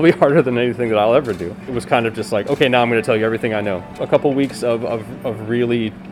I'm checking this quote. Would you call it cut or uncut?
cut